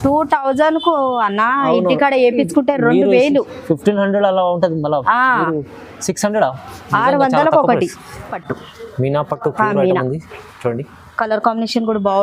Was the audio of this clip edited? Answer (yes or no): yes